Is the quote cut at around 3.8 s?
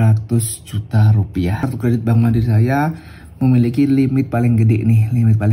no; 1 cut; at 1.7 s

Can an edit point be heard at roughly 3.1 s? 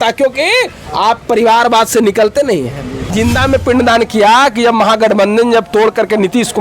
yes; 1 cut; at 3.1 s

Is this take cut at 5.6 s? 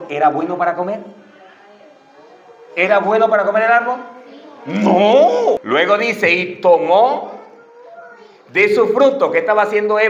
yes; 1 cut; at 5.6 s

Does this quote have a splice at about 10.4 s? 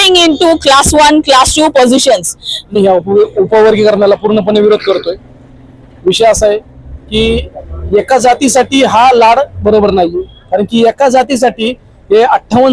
no; 1 cut; at 2.7 s

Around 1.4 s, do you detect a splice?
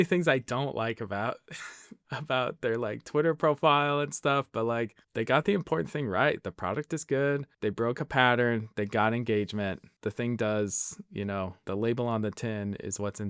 no; 0 cuts

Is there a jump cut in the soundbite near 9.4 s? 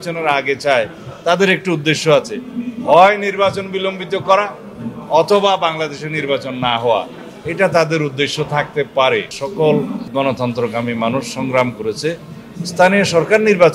yes; 2 cuts; at 9.4 s, 10.0 s

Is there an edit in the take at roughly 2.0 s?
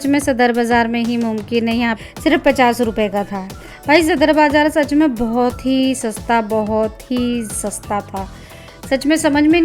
yes; 1 cut; at 2.0 s

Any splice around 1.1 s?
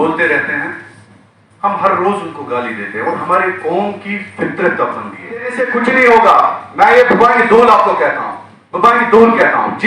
no; 1 cut; at 5.6 s

